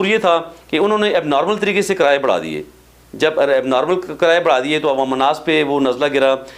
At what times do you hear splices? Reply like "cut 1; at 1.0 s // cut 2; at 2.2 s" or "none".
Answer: none

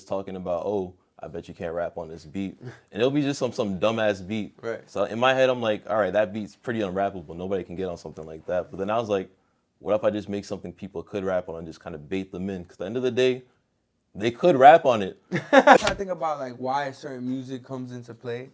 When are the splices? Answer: cut 1; at 15.8 s

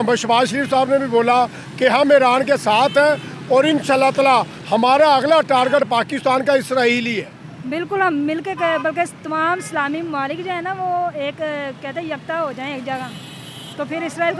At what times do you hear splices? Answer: none

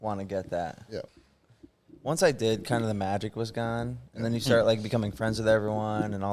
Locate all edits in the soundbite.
cut 1; at 1.2 s

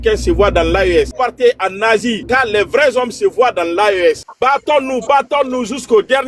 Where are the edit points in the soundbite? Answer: cut 1; at 1.1 s // cut 2; at 2.2 s // cut 3; at 4.3 s

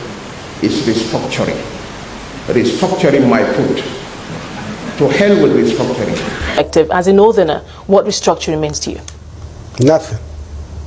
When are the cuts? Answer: cut 1; at 6.5 s

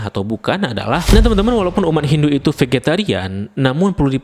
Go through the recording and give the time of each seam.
cut 1; at 1.0 s

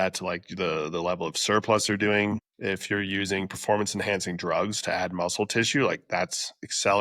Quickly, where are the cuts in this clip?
cut 1; at 2.5 s

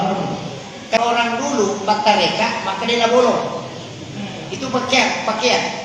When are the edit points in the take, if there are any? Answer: cut 1; at 1.0 s

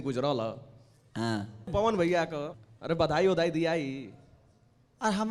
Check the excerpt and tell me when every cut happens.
cut 1; at 1.7 s // cut 2; at 2.5 s

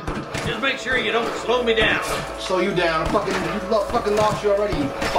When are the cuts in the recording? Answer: none

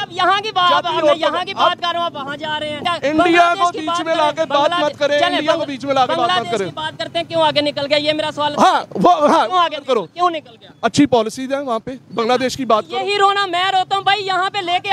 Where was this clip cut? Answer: cut 1; at 2.8 s

